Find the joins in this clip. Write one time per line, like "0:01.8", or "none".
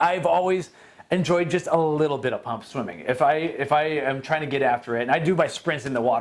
none